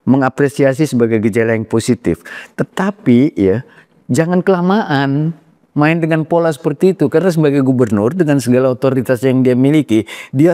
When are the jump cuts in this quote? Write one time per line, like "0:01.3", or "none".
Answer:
none